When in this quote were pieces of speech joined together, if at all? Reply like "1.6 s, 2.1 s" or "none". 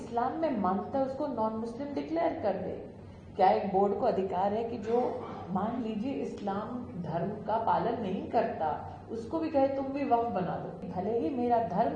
10.8 s